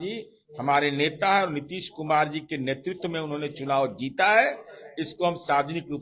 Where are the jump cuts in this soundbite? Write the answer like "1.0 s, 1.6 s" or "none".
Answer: none